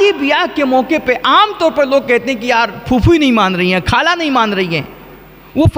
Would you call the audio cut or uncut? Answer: uncut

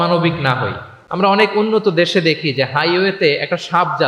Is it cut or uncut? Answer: cut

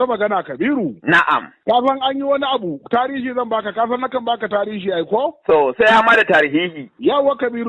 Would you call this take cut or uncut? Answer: uncut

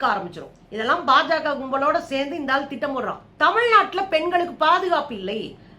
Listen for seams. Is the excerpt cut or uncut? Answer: cut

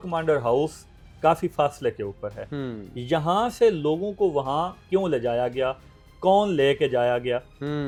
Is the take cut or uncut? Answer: uncut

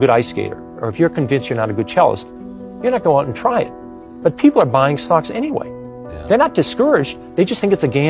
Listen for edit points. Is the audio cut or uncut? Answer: uncut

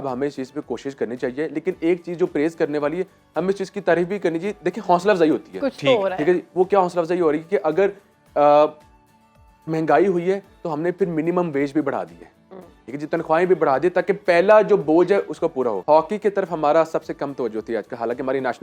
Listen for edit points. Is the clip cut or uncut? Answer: cut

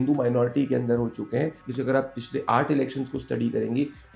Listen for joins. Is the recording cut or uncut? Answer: cut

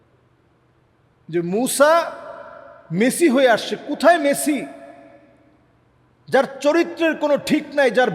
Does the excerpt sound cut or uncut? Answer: uncut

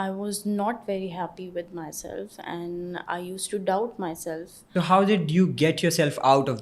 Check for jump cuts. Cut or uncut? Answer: cut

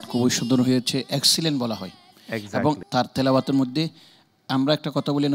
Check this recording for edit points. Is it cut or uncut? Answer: uncut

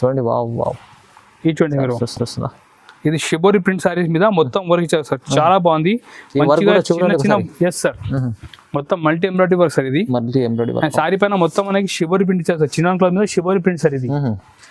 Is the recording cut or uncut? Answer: uncut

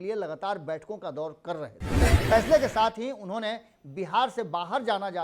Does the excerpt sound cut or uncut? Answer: cut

